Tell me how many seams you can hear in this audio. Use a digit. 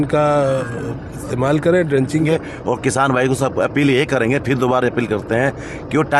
1